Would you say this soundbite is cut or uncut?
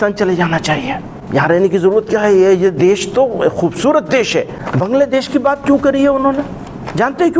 cut